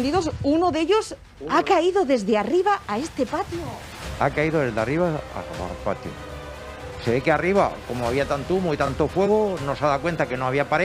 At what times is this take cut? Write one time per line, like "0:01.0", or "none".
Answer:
none